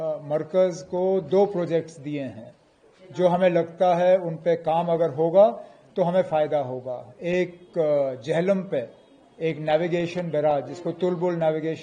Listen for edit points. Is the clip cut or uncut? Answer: uncut